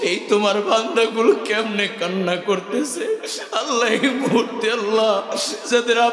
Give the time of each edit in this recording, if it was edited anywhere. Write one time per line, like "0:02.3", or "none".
none

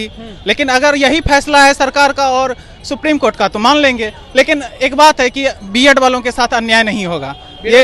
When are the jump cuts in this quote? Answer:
none

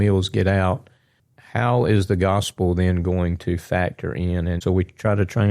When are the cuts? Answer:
0:04.6

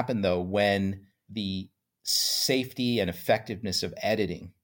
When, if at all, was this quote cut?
0:01.1

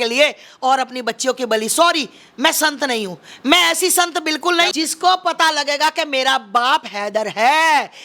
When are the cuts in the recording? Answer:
0:04.7

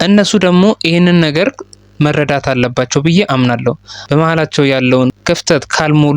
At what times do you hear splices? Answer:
0:03.9

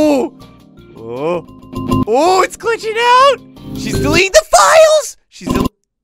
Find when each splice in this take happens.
none

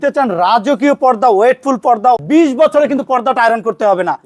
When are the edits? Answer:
0:02.2

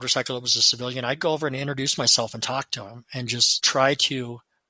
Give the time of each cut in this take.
none

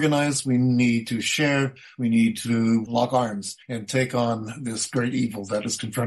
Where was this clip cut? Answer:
none

